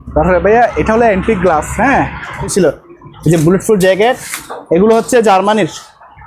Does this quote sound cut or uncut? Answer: cut